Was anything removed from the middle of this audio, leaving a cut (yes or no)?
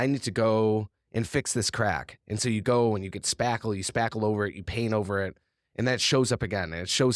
no